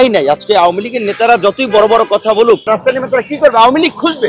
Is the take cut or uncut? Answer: cut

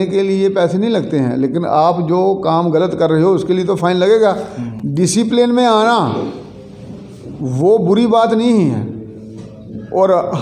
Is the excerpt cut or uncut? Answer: uncut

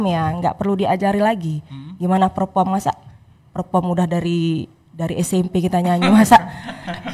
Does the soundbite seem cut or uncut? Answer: uncut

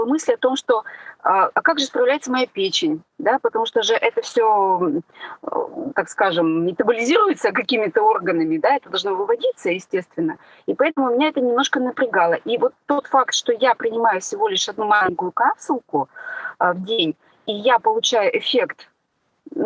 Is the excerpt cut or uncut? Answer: uncut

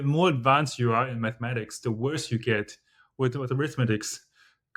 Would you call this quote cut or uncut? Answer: uncut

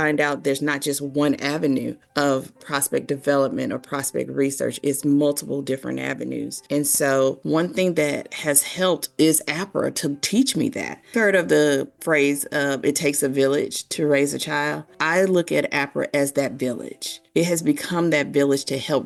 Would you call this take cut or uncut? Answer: uncut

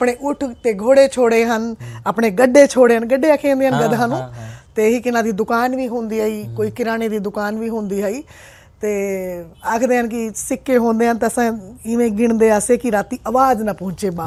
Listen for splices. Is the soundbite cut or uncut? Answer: uncut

